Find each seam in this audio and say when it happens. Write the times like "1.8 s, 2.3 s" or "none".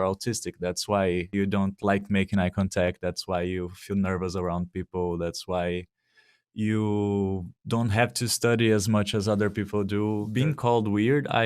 1.3 s, 10.3 s